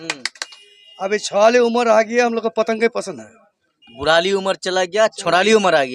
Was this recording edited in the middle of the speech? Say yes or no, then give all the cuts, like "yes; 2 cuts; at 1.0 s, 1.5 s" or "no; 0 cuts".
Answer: no; 0 cuts